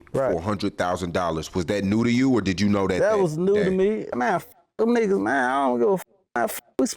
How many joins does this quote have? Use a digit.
1